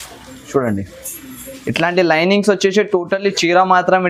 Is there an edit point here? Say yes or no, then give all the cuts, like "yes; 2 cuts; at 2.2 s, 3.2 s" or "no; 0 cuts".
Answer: no; 0 cuts